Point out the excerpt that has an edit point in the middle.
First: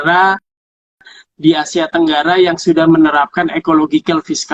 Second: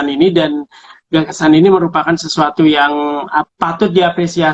second; 1 cut; at 3.5 s

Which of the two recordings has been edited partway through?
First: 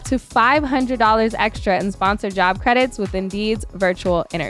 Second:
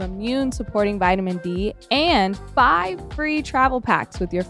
second; 1 cut; at 2.4 s

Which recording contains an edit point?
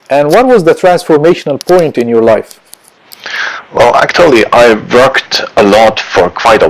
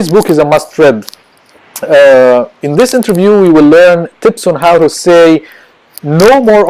second; 1 cut; at 4.7 s

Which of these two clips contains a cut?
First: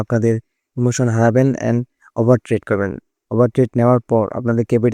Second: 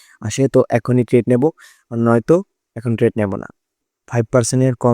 second; 1 cut; at 3.7 s

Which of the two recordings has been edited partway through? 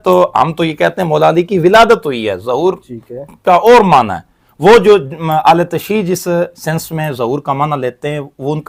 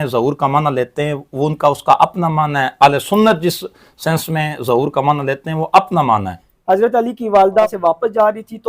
second; 2 cuts; at 6.3 s, 7.7 s

